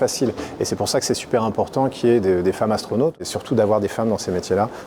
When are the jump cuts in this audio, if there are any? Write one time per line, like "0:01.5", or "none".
0:03.2